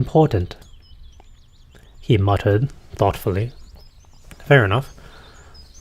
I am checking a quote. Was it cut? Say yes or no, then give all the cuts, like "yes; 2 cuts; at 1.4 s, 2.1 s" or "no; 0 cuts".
no; 0 cuts